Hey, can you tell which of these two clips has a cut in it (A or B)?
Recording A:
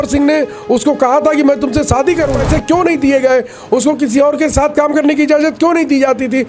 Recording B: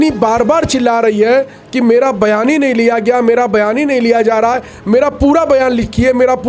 A